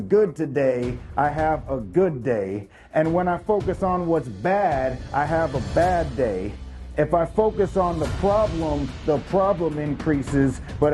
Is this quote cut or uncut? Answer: uncut